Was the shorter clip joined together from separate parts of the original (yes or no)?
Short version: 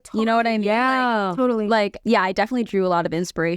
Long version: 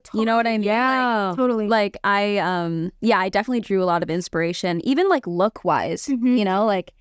yes